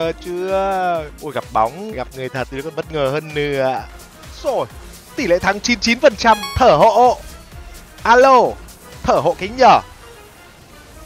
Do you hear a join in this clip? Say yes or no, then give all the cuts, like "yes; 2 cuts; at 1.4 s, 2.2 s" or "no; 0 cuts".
yes; 3 cuts; at 1.2 s, 1.9 s, 4.0 s